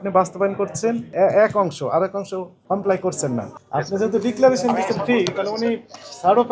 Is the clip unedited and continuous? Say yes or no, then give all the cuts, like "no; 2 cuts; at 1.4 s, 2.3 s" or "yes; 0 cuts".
no; 3 cuts; at 1.1 s, 2.5 s, 3.6 s